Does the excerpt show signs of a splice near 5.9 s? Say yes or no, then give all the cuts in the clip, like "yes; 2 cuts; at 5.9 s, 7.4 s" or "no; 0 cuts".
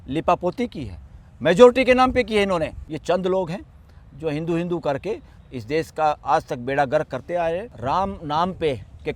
no; 2 cuts; at 2.8 s, 7.7 s